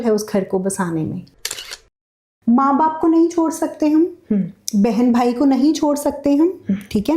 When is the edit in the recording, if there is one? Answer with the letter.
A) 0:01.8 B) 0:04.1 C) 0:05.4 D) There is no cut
A